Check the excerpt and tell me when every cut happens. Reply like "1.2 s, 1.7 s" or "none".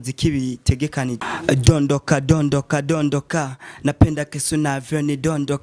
1.2 s